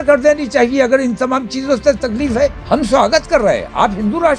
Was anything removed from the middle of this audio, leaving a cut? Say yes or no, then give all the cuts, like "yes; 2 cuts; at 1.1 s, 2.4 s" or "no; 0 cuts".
yes; 1 cut; at 2.6 s